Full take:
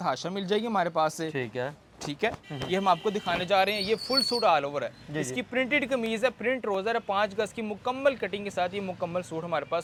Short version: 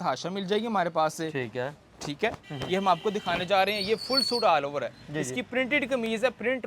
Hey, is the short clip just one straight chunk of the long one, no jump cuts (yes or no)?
yes